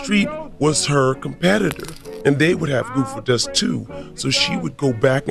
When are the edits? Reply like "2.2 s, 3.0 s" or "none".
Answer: none